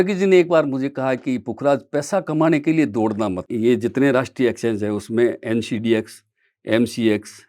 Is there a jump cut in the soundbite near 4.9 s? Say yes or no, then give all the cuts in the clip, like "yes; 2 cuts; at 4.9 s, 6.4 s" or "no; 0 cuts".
no; 1 cut; at 3.5 s